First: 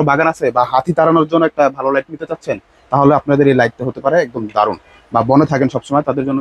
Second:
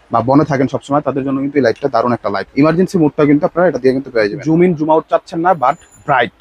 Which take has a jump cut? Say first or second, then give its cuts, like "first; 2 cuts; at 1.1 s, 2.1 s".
second; 2 cuts; at 2.4 s, 4.4 s